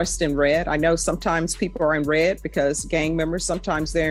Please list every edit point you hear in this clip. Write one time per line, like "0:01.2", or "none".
none